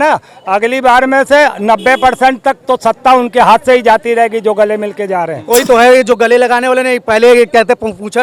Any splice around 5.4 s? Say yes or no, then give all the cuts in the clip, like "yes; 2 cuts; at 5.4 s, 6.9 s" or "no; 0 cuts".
yes; 1 cut; at 5.4 s